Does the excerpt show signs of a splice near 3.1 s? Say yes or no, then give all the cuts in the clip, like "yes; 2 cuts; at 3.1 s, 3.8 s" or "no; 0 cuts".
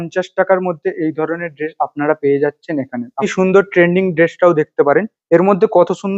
yes; 1 cut; at 3.1 s